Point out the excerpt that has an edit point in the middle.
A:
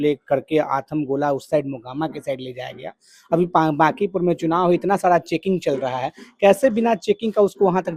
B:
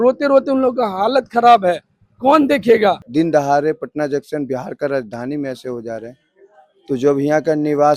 B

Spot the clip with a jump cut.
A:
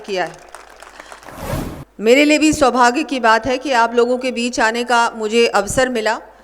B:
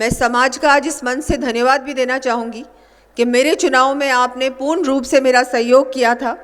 A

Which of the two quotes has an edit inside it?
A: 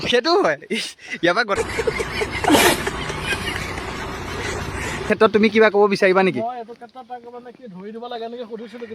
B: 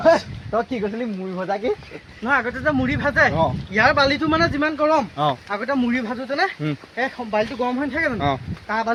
A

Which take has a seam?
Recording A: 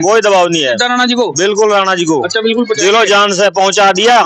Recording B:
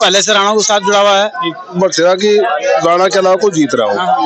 B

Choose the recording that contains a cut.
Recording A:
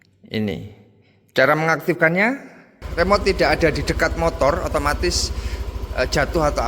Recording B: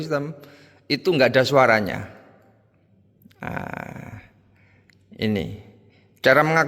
A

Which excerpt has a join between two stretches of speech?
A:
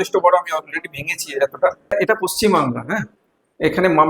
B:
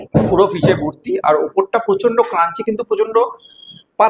A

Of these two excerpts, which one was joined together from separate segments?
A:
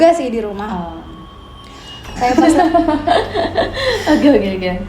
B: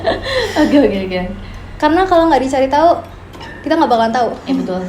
A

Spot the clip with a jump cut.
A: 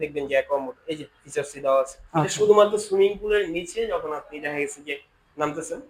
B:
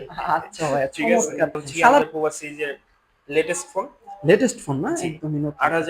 B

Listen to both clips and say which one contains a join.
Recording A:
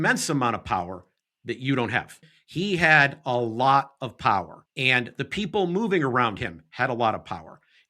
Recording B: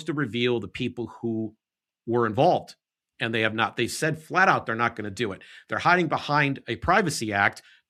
A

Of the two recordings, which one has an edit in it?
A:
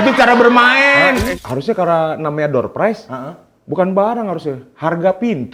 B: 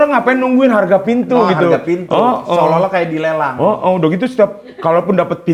A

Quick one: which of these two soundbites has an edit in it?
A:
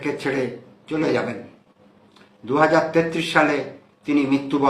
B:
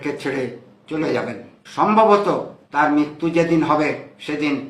B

